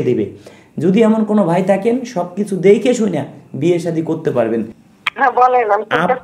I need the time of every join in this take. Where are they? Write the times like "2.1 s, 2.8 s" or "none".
4.8 s